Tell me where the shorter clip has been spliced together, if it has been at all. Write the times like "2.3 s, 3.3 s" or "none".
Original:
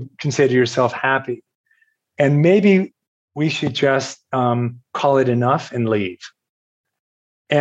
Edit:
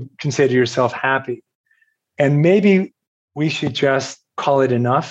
4.2 s